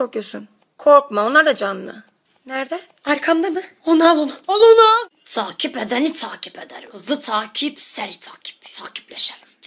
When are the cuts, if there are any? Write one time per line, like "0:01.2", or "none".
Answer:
0:05.2